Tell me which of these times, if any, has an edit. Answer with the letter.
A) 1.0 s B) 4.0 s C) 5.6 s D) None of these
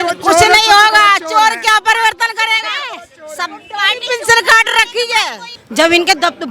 C